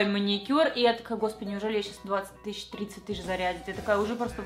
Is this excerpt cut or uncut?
uncut